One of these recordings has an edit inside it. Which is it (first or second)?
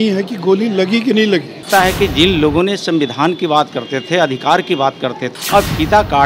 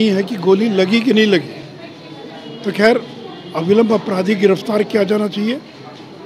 first